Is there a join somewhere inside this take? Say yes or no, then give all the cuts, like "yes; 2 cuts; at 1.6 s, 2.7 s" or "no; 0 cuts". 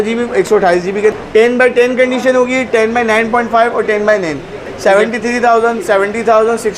yes; 2 cuts; at 1.2 s, 4.7 s